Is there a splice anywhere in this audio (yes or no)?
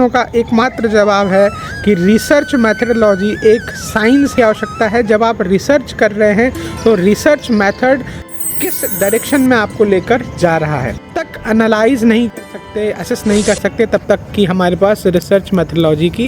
yes